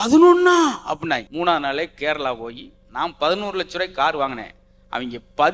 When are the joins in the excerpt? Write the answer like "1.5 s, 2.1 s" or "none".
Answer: 1.3 s